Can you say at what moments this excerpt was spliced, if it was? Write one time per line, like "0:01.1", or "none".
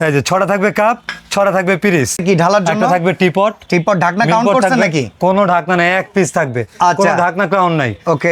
0:02.2